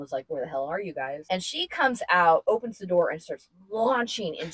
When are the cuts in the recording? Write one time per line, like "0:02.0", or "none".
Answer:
0:01.2
0:02.4